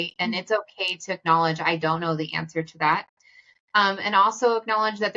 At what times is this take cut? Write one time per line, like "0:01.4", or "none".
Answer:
none